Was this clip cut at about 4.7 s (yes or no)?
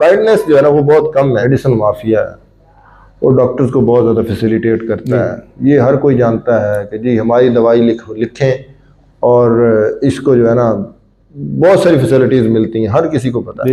no